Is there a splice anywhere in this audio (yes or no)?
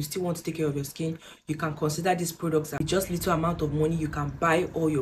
yes